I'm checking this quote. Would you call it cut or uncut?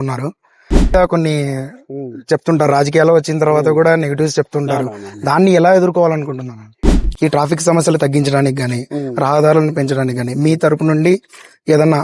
cut